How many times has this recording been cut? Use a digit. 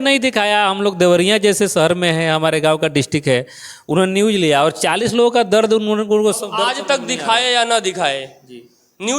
0